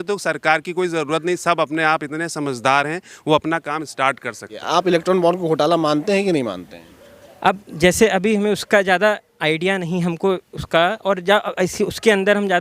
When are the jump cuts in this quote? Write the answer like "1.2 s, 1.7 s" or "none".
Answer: 4.5 s